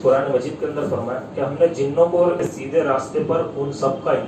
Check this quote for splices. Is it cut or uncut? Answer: cut